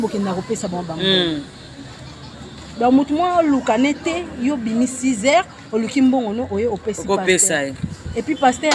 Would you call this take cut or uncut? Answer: uncut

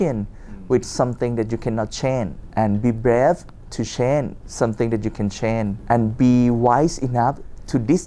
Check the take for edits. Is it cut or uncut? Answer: cut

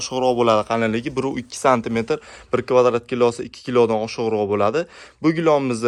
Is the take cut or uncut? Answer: uncut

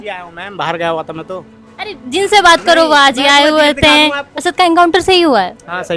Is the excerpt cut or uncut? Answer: cut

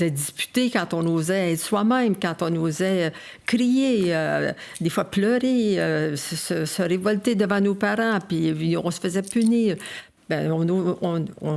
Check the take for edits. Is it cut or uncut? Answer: uncut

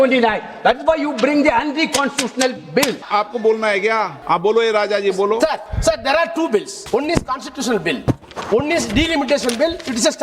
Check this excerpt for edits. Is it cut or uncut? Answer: cut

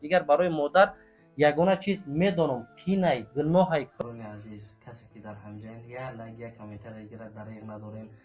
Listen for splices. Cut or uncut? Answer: cut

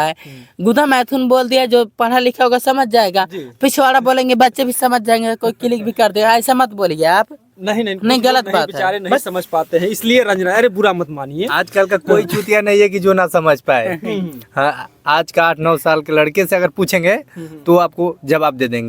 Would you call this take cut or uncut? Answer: uncut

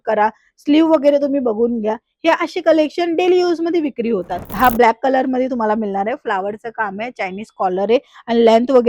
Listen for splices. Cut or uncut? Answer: cut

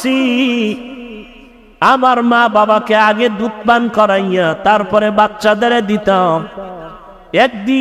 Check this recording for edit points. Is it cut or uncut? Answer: uncut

